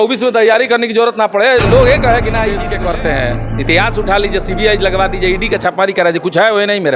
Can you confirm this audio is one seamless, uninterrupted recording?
no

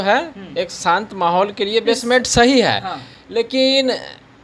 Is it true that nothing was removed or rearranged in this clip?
yes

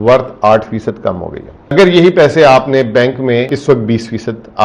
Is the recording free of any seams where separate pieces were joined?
no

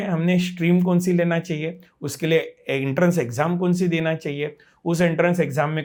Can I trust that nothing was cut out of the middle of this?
yes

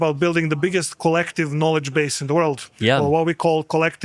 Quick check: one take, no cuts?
yes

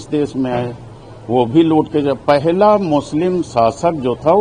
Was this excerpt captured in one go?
yes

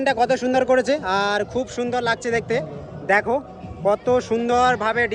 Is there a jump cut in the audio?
no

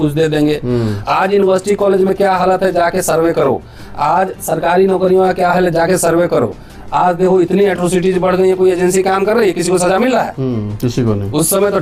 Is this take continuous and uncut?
yes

